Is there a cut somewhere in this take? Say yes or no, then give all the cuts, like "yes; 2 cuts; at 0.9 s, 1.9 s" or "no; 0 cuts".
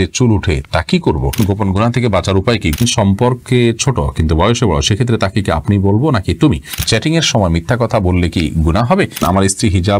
yes; 4 cuts; at 1.4 s, 2.8 s, 6.8 s, 9.2 s